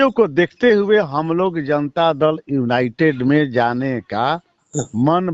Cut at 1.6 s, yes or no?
no